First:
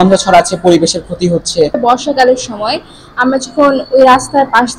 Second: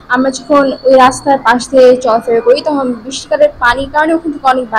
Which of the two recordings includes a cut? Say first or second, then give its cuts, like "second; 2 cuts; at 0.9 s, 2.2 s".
first; 1 cut; at 1.7 s